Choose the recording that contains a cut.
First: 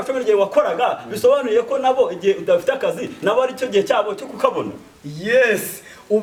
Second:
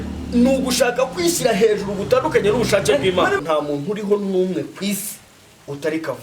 second; 1 cut; at 3.4 s

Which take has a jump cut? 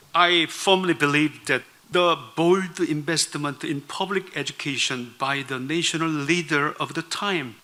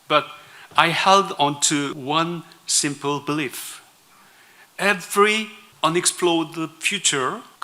second; 1 cut; at 2.0 s

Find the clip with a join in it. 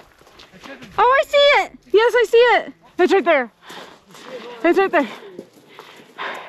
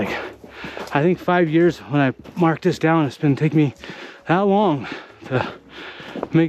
first; 2 cuts; at 1.8 s, 2.8 s

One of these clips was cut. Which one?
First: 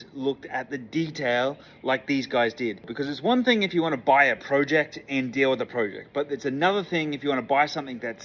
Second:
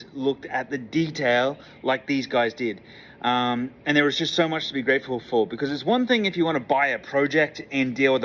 first; 1 cut; at 2.9 s

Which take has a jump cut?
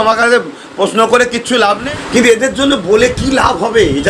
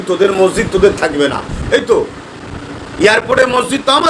first; 1 cut; at 1.8 s

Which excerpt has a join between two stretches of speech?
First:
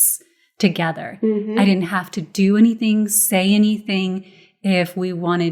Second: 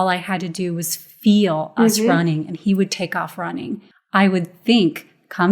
second; 1 cut; at 3.8 s

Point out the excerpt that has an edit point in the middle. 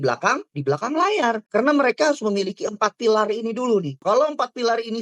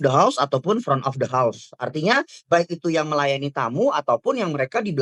first; 2 cuts; at 1.4 s, 4.0 s

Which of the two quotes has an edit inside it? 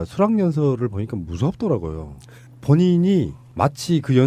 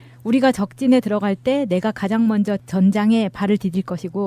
second; 1 cut; at 1.9 s

